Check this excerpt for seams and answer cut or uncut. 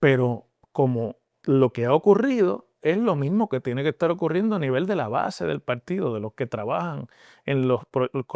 uncut